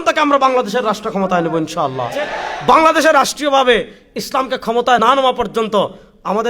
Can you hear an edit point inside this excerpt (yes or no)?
yes